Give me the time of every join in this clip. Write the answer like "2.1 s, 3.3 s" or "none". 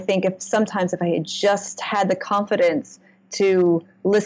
none